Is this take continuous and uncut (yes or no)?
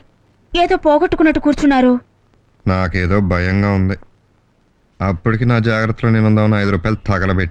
yes